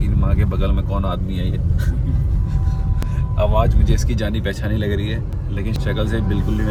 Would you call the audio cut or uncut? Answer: uncut